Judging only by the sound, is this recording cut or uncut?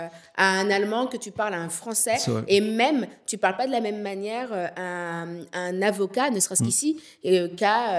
uncut